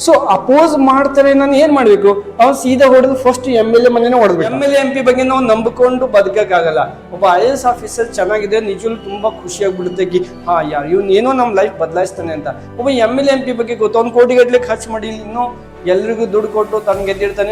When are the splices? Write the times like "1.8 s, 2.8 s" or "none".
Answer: 4.6 s